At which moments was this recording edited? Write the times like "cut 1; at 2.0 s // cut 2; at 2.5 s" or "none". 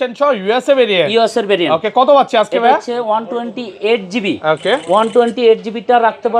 none